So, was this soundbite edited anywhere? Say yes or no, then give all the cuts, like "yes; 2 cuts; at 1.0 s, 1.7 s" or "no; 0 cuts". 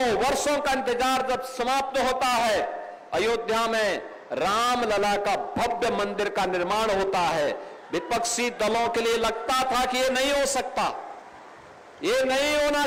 no; 0 cuts